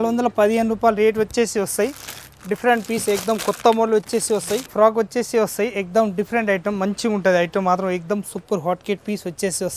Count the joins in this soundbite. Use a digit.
1